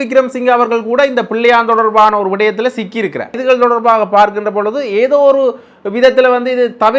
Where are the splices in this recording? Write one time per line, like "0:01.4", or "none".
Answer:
0:03.4